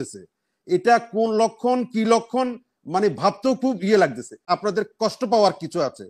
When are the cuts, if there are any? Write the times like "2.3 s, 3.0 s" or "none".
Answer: 4.4 s